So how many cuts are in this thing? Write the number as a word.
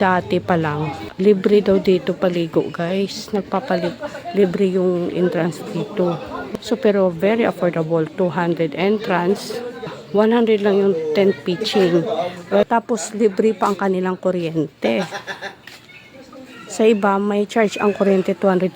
four